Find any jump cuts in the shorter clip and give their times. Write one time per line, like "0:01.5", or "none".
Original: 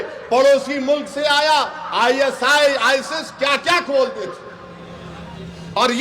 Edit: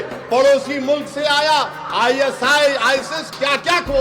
none

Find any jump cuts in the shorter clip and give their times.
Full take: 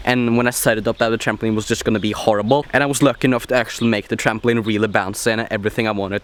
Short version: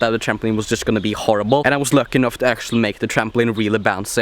0:01.6

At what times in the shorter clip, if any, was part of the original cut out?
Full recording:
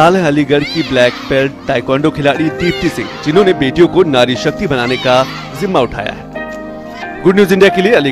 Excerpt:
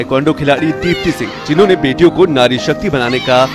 none

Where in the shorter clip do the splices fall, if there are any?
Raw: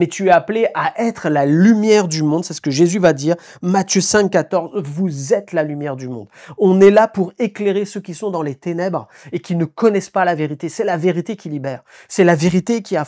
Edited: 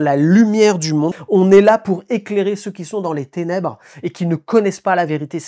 0:01.2

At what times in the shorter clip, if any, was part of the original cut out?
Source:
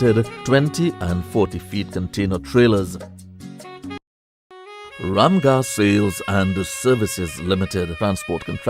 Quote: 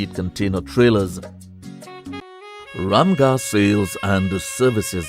0:02.3

